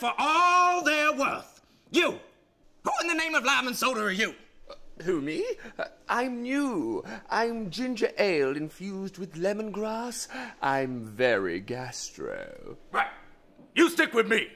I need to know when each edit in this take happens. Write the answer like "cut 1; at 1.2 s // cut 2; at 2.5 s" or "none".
cut 1; at 10.2 s